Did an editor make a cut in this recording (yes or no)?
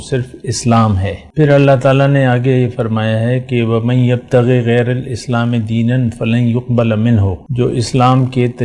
yes